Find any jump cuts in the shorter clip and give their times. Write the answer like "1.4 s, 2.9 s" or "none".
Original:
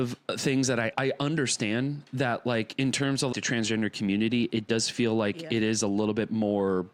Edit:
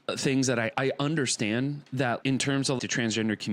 2.2 s